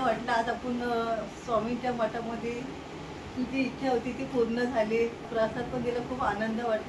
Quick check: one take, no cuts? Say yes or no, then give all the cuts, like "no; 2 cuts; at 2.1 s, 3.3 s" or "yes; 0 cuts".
no; 1 cut; at 5.2 s